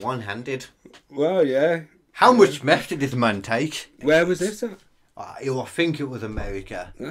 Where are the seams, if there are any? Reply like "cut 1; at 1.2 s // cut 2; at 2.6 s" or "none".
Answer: cut 1; at 3.9 s